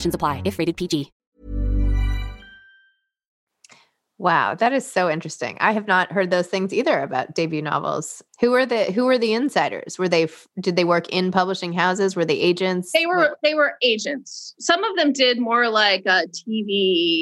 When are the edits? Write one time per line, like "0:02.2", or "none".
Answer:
none